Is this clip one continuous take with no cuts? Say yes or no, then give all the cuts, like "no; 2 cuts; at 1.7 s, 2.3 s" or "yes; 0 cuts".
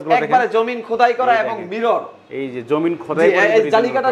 yes; 0 cuts